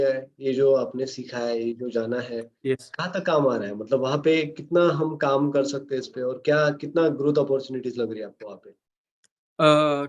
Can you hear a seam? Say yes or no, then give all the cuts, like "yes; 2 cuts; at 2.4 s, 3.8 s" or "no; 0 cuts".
no; 0 cuts